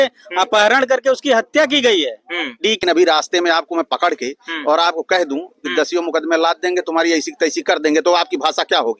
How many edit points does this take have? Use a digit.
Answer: 1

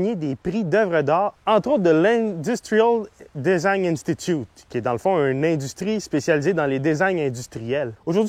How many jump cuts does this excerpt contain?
0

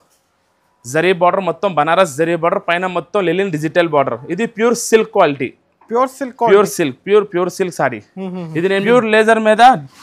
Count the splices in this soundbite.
1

